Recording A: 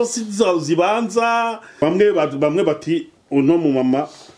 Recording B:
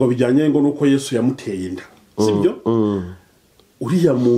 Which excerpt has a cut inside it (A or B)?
A